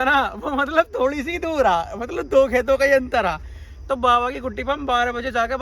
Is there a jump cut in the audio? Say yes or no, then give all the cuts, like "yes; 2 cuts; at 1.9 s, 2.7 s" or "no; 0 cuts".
no; 0 cuts